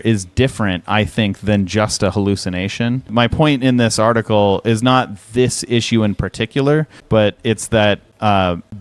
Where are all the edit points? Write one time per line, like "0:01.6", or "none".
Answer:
0:03.1